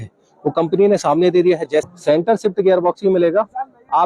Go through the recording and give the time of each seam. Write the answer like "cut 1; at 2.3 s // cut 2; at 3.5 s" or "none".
cut 1; at 1.9 s